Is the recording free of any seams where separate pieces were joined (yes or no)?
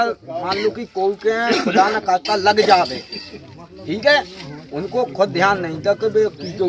yes